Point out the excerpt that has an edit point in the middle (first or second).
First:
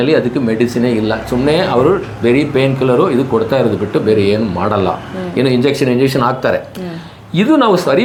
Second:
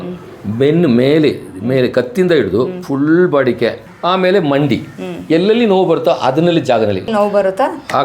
second